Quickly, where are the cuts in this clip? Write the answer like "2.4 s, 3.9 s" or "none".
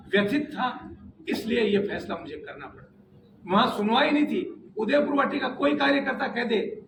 none